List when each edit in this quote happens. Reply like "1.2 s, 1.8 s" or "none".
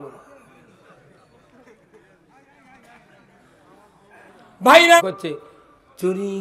5.0 s